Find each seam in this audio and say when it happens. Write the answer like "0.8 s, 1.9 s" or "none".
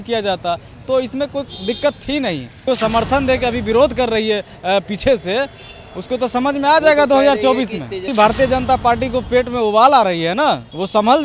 2.6 s, 8.1 s